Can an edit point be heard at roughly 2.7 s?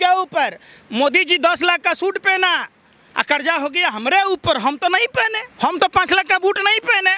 no; 1 cut; at 5.4 s

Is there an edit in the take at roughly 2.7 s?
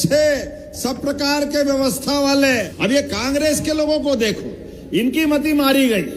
yes; 1 cut; at 2.7 s

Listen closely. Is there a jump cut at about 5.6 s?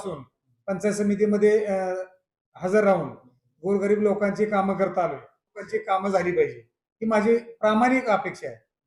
yes; 1 cut; at 5.6 s

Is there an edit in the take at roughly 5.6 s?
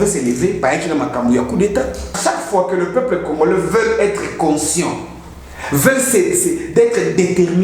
no; 1 cut; at 2.2 s

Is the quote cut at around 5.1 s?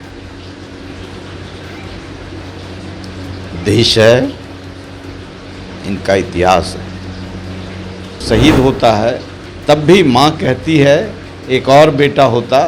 no; 1 cut; at 8.2 s

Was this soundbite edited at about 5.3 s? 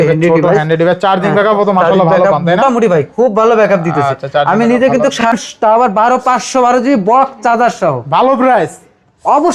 yes; 1 cut; at 5.3 s

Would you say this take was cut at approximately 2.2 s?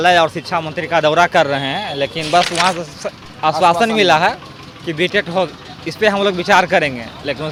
no; 0 cuts

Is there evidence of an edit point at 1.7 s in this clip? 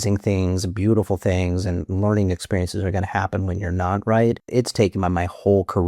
no; 1 cut; at 4.4 s

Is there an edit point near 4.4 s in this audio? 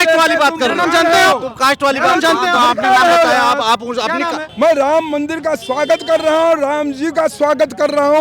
yes; 1 cut; at 4.4 s

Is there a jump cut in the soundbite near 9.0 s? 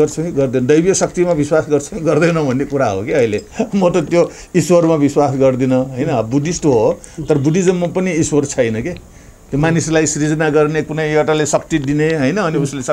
no; 1 cut; at 3.5 s

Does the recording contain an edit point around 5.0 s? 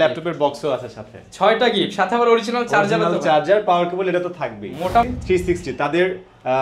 yes; 1 cut; at 5.0 s

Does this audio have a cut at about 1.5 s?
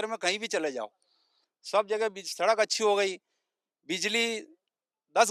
no; 0 cuts

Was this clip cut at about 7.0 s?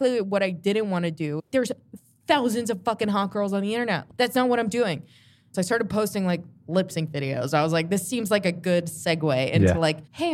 no; 2 cuts; at 1.5 s, 5.5 s

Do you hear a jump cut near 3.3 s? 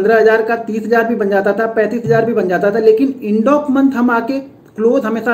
no; 0 cuts

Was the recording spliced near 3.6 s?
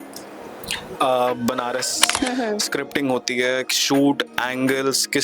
no; 1 cut; at 2.0 s

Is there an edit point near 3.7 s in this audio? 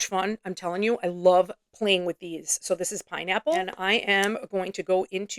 yes; 1 cut; at 3.7 s

